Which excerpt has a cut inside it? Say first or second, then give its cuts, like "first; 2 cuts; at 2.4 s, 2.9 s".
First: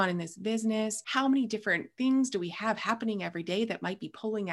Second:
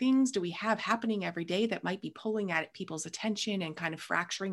first; 1 cut; at 1.0 s